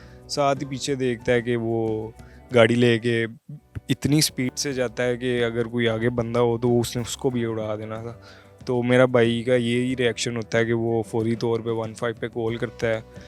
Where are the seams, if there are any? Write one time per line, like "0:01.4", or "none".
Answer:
none